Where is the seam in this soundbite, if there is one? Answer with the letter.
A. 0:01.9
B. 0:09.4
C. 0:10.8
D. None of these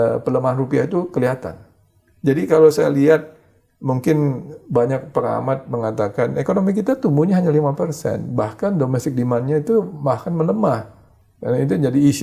D